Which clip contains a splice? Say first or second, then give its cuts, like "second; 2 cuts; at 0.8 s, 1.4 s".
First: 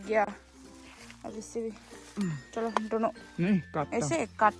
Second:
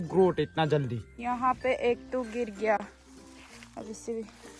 second; 1 cut; at 1.1 s